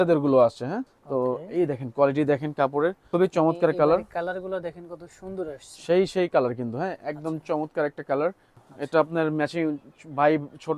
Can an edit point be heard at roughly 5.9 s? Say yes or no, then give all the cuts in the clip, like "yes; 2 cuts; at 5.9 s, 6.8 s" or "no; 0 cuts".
no; 3 cuts; at 0.9 s, 3.0 s, 8.6 s